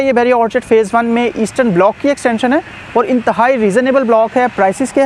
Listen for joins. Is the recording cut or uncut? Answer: uncut